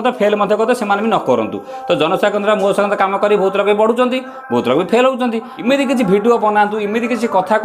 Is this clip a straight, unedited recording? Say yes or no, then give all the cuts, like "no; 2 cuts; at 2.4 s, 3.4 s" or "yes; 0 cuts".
no; 1 cut; at 5.5 s